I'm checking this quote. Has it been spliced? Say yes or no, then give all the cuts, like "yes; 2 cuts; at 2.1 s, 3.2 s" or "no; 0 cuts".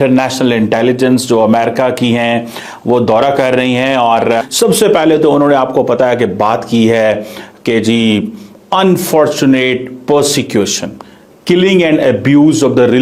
yes; 1 cut; at 4.5 s